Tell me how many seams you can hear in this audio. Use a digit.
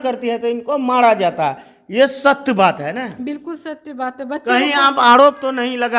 0